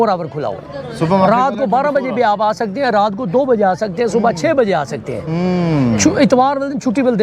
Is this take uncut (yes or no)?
yes